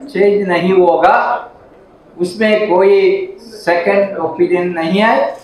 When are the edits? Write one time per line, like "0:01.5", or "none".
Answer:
none